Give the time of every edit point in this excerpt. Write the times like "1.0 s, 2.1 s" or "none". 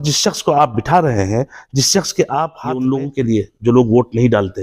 2.8 s